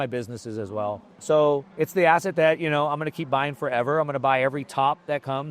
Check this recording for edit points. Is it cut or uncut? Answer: cut